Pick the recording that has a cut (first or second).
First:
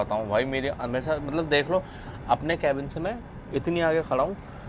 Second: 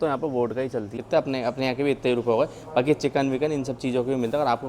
second